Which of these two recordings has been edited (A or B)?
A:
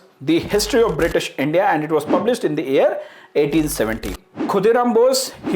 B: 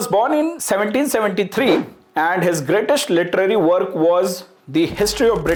A